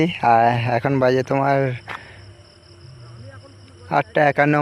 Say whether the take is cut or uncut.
uncut